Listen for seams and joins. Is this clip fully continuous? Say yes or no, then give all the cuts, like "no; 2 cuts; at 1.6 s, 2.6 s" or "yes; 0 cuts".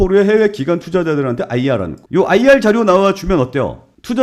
no; 1 cut; at 2.0 s